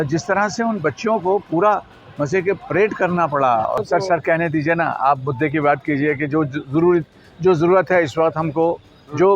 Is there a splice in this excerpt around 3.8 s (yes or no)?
yes